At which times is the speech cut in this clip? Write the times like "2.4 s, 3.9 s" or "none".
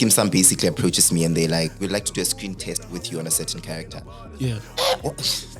1.8 s